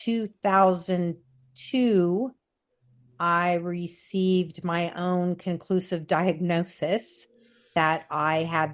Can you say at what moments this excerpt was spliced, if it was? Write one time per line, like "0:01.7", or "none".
none